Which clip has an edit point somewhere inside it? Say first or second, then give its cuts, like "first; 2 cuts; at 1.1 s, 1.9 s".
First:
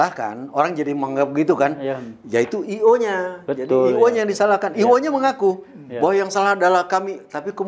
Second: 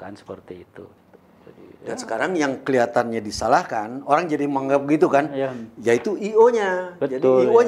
second; 1 cut; at 0.9 s